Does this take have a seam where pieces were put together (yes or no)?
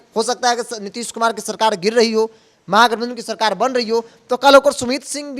no